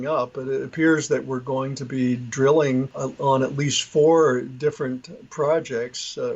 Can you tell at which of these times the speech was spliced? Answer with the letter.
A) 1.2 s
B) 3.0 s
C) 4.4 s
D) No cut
B